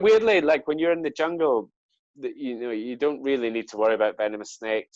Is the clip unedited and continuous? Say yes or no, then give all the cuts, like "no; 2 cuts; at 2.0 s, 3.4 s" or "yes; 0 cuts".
yes; 0 cuts